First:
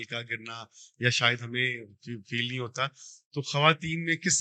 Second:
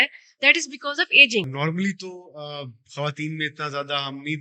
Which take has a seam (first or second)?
second